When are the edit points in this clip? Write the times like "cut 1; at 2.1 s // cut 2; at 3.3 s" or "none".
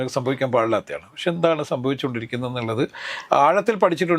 none